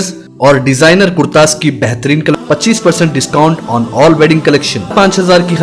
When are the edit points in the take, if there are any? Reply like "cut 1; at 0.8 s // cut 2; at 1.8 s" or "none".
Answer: cut 1; at 2.3 s // cut 2; at 4.9 s